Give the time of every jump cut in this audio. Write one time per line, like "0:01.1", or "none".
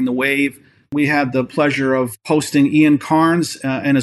0:00.9

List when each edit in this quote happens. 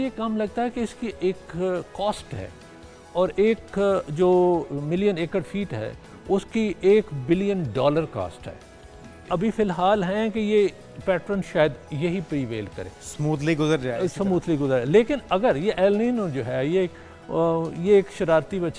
0:09.2

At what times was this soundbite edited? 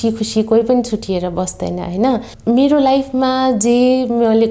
0:02.3

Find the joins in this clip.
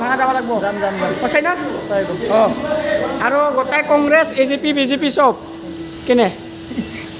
none

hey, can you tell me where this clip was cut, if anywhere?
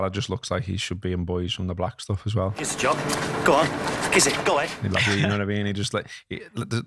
0:02.7
0:04.8

